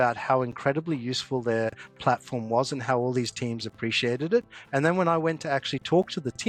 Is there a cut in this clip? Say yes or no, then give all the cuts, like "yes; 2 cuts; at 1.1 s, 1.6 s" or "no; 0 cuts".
no; 0 cuts